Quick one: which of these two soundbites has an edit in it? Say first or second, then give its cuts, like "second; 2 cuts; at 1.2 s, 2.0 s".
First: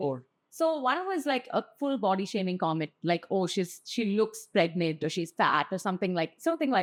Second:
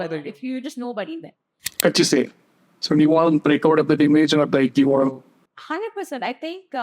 second; 1 cut; at 1.6 s